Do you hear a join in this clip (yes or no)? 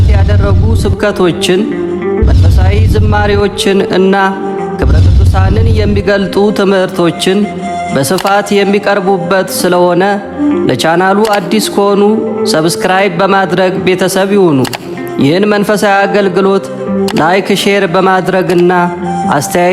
no